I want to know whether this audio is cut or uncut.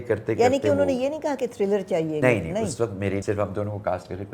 cut